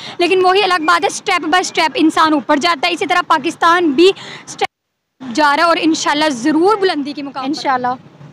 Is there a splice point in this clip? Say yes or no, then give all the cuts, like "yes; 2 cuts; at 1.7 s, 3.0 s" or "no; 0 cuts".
yes; 1 cut; at 7.2 s